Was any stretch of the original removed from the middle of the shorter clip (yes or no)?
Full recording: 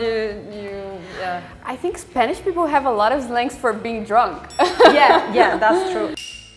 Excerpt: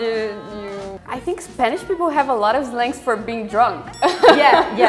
yes